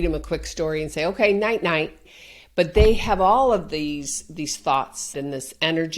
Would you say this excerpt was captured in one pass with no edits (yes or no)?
no